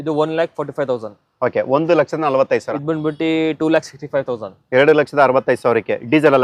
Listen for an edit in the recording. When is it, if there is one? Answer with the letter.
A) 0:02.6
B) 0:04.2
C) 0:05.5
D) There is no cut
A